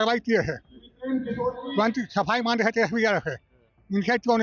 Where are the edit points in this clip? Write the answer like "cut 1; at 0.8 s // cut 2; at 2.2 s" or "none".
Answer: none